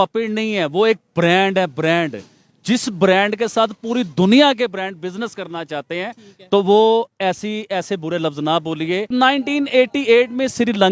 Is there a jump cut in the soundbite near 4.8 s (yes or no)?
no